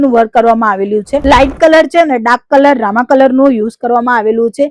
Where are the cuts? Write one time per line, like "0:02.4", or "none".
0:01.1